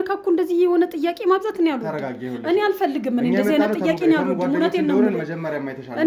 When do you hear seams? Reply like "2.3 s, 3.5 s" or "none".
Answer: none

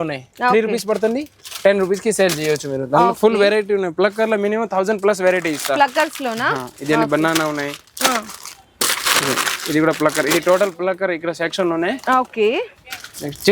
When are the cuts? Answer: none

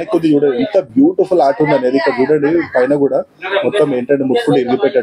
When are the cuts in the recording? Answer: none

